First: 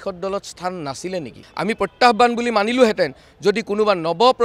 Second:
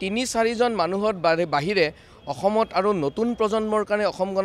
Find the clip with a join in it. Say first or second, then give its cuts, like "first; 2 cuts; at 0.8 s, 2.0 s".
first; 1 cut; at 1.4 s